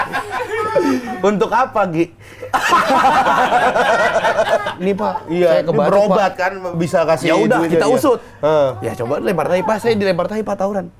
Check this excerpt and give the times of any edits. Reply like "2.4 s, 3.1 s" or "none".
4.7 s